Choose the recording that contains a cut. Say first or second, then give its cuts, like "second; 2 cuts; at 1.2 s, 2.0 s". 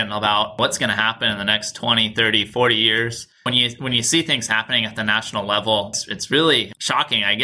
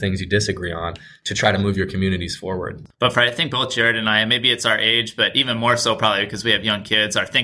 second; 1 cut; at 2.8 s